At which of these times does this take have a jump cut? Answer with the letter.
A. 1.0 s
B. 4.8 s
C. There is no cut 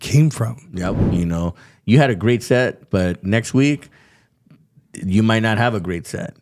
A